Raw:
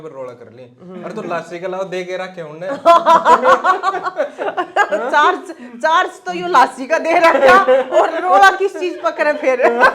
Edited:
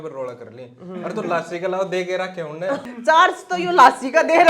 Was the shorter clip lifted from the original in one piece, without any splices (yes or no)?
no